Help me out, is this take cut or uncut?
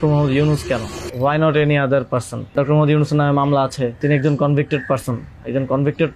cut